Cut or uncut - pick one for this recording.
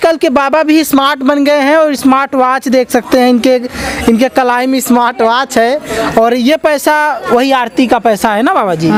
uncut